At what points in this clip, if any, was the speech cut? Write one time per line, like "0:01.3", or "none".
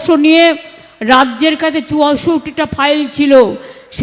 none